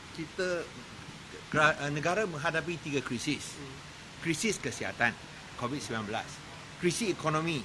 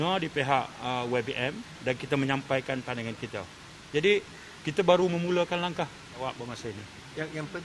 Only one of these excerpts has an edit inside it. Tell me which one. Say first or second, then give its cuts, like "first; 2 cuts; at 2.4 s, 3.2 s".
second; 1 cut; at 6.2 s